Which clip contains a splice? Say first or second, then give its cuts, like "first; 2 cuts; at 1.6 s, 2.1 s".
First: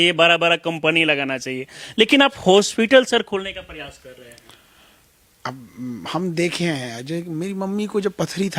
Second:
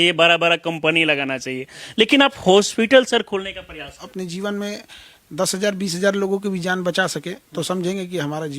second; 1 cut; at 4.0 s